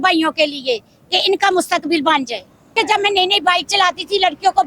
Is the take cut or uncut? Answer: cut